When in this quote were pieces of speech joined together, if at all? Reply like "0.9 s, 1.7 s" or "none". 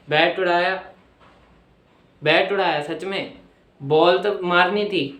none